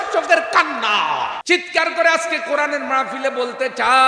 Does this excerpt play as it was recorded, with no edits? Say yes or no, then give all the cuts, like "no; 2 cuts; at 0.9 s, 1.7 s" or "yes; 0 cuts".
no; 1 cut; at 1.4 s